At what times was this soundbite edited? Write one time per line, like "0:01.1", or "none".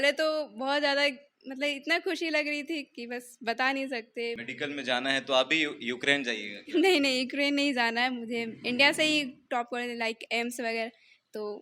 0:04.4